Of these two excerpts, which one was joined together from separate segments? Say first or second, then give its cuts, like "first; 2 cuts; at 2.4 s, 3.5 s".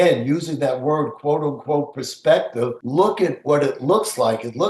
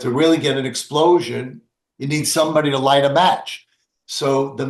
first; 1 cut; at 2.8 s